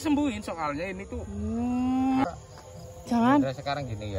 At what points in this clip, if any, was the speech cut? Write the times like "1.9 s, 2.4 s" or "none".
2.2 s